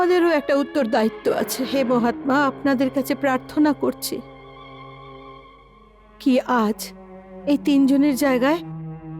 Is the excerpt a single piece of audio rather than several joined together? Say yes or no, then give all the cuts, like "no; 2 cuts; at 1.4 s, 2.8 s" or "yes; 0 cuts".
no; 1 cut; at 1.6 s